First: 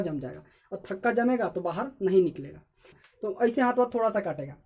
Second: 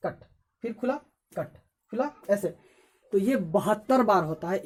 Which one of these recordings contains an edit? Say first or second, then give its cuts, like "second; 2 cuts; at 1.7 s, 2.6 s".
first; 1 cut; at 3.0 s